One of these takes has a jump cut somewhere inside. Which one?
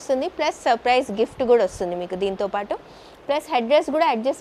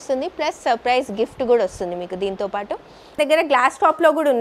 second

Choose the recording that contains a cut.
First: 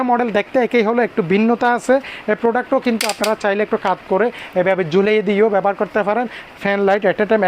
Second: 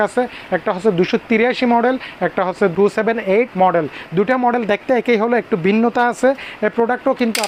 first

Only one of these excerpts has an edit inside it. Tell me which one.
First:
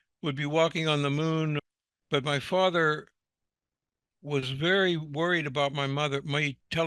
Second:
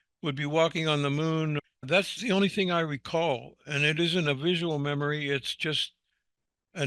first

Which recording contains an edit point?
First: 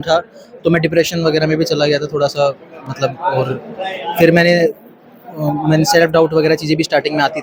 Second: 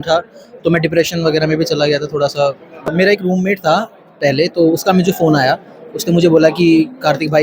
second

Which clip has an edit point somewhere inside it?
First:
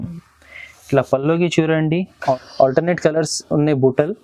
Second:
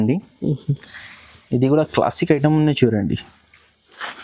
first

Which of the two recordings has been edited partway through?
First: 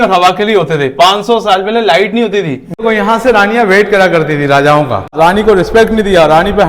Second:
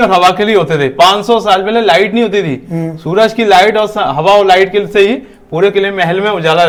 first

